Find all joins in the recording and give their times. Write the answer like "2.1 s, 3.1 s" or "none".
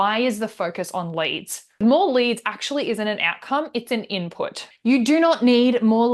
1.8 s, 4.6 s

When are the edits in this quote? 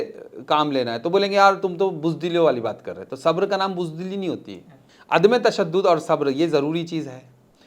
none

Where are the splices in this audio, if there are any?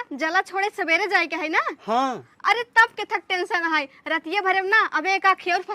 none

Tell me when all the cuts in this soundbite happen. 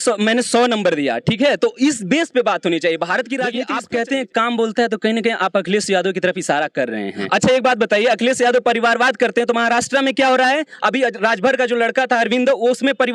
3.6 s, 7.2 s

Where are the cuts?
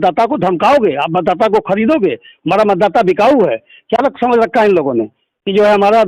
none

